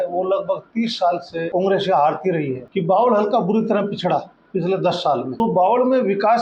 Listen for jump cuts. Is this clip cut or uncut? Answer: cut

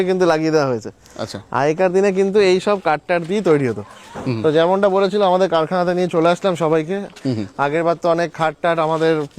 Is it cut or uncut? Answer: uncut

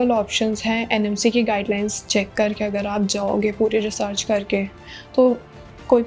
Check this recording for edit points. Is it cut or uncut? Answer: uncut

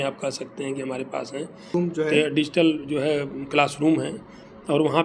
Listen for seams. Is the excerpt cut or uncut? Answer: cut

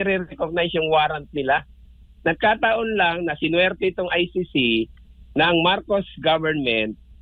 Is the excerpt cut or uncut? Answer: uncut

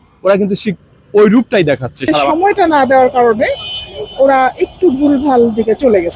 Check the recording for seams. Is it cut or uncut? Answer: cut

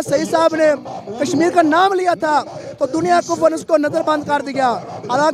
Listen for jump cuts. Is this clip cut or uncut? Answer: uncut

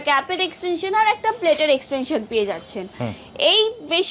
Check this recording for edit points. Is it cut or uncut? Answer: uncut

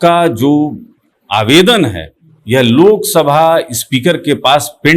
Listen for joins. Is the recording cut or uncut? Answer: uncut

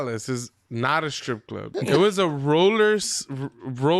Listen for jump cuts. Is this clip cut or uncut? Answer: cut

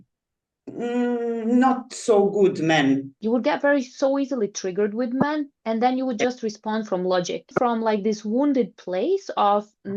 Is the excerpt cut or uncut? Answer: cut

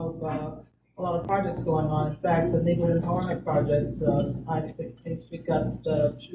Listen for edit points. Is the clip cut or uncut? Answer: uncut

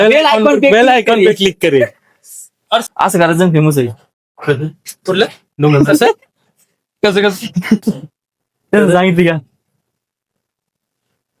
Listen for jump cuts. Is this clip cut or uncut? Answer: cut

